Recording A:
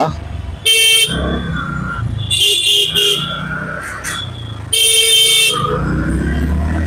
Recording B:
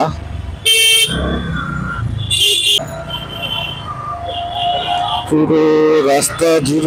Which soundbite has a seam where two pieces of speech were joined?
B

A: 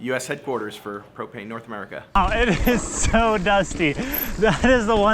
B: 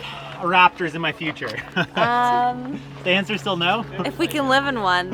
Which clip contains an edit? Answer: A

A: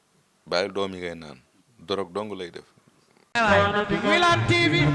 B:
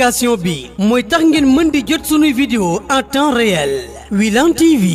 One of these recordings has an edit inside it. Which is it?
A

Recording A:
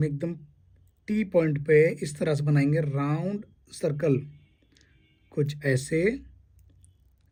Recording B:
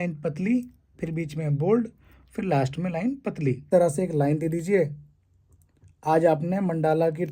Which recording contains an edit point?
B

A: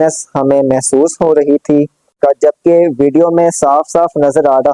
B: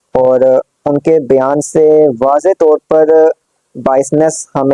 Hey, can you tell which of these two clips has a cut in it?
A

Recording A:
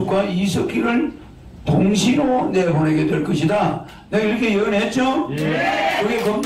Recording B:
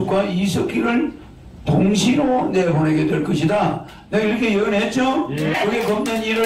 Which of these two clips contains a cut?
B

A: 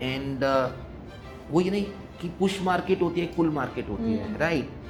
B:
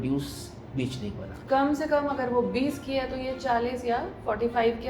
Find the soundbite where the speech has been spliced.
B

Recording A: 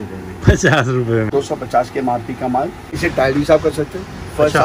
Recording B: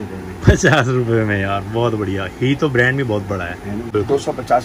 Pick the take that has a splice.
A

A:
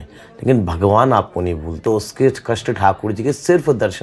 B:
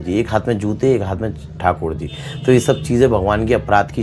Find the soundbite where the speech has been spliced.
A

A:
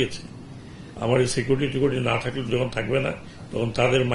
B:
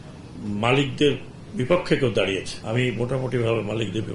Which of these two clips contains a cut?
B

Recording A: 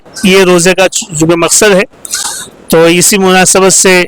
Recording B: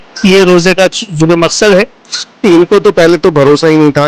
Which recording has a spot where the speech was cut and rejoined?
B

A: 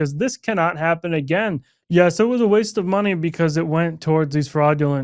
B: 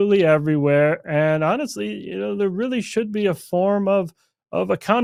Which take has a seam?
A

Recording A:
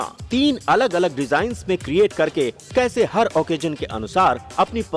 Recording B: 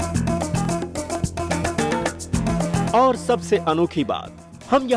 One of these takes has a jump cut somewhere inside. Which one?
B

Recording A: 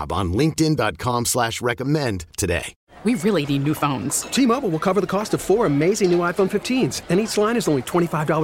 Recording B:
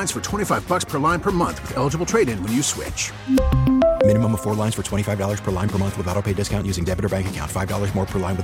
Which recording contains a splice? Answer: A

